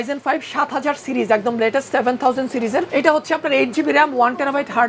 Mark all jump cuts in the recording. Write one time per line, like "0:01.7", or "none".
0:02.9